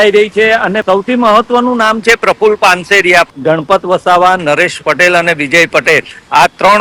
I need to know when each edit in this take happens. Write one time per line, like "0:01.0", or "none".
0:00.8
0:03.3